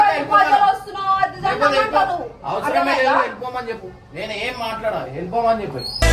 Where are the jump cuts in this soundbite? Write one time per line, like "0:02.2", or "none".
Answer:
none